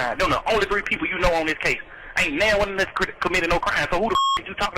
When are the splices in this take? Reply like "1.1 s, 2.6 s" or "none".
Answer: none